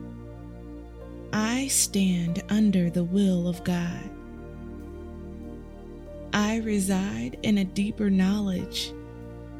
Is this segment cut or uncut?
cut